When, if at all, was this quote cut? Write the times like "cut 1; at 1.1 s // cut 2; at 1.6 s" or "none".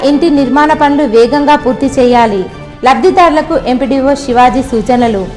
none

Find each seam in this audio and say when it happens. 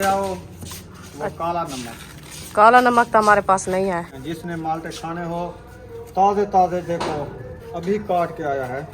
cut 1; at 4.1 s

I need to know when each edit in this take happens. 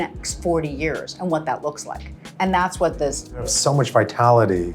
cut 1; at 3.5 s

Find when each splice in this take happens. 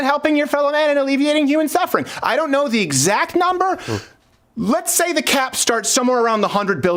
none

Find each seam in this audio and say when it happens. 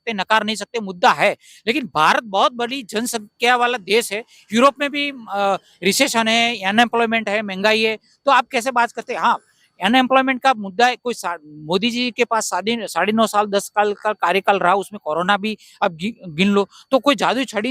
none

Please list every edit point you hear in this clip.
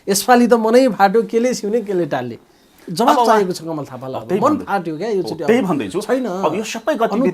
none

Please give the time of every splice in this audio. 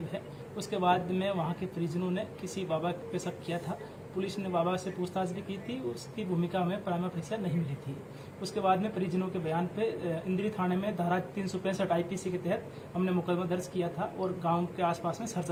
none

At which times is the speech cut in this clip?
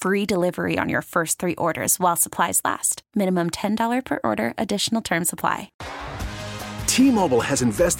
cut 1; at 5.7 s

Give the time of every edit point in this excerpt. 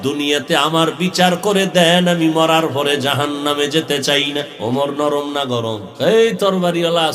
cut 1; at 4.5 s // cut 2; at 5.9 s

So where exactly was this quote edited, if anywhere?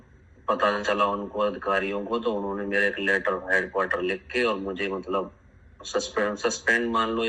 none

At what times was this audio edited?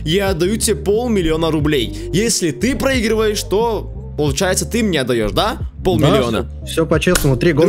none

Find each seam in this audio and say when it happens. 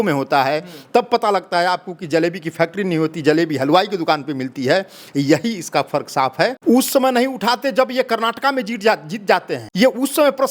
cut 1; at 6.6 s // cut 2; at 9.6 s

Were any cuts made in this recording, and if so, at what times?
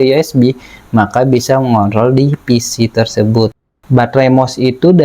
cut 1; at 3.7 s

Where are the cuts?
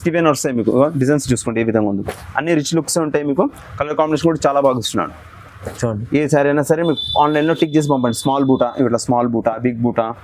none

